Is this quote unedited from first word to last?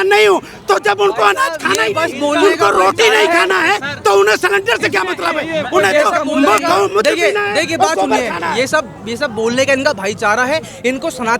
yes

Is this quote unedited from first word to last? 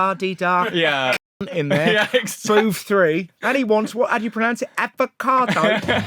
yes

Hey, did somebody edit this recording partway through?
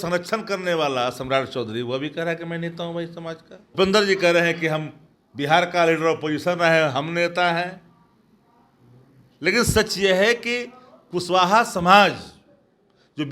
yes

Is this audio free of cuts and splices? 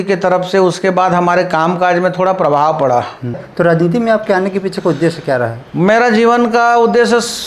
no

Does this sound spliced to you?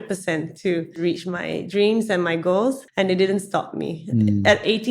yes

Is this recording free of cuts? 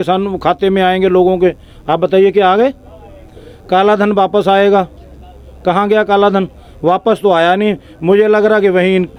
yes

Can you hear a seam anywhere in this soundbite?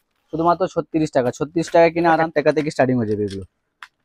yes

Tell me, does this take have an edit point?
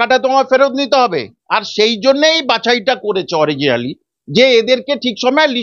no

